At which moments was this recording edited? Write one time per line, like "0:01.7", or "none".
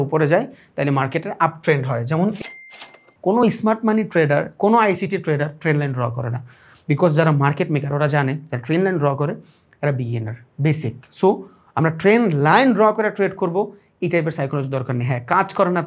0:02.5